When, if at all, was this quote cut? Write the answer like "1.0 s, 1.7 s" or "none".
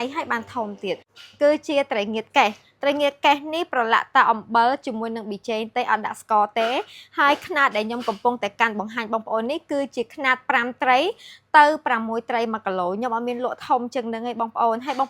1.1 s